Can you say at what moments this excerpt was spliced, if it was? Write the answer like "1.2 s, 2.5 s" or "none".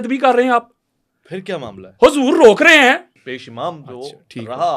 3.1 s